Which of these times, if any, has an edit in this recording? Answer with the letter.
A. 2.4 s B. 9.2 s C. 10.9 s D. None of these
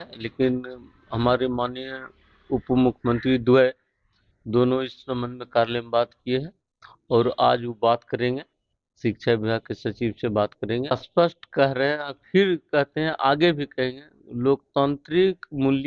C